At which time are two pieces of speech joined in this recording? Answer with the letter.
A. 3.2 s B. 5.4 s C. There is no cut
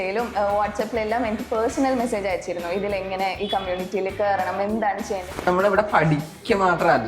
B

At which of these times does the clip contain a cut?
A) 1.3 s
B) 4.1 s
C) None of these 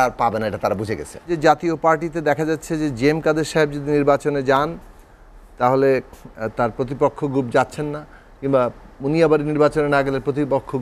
A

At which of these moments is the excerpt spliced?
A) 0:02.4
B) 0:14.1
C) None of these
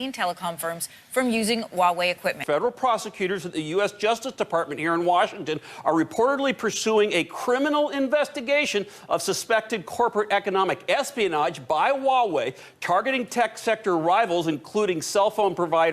A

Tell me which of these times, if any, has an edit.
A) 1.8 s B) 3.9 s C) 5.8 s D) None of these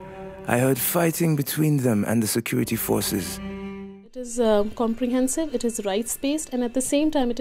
B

